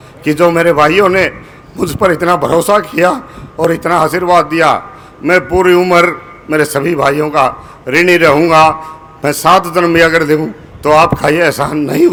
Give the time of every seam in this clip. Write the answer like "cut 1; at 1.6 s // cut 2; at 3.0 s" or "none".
none